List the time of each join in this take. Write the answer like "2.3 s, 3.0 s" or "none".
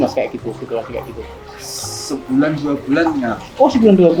none